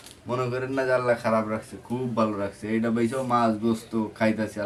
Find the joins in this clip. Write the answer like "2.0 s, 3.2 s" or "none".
none